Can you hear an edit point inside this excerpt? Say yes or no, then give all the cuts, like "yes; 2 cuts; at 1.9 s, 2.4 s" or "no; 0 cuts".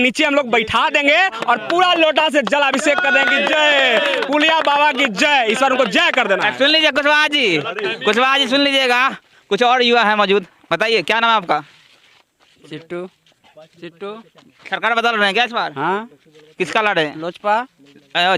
no; 0 cuts